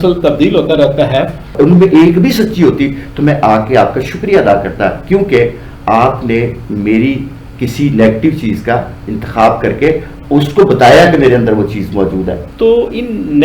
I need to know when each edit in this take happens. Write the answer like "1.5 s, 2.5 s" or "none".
1.4 s, 12.4 s